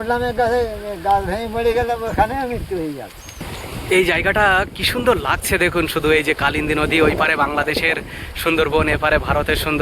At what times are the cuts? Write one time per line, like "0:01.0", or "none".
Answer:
0:03.4